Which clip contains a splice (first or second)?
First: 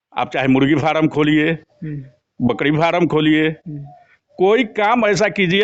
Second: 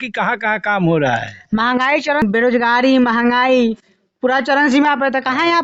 second